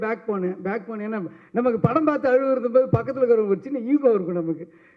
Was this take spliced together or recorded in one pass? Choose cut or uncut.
uncut